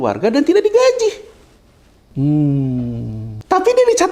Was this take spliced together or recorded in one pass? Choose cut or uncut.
uncut